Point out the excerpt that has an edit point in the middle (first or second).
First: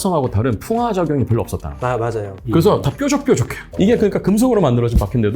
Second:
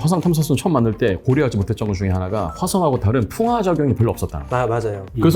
first